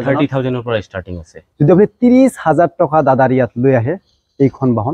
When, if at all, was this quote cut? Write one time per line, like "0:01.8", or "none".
none